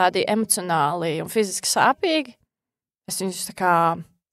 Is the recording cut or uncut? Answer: uncut